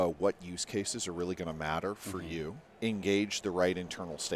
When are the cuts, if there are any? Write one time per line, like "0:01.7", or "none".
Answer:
0:02.6